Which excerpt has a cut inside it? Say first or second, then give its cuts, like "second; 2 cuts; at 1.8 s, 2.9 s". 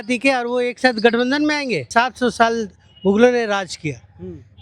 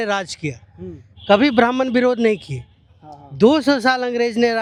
first; 1 cut; at 1.9 s